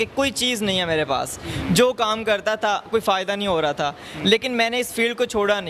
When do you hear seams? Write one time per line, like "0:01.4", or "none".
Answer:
none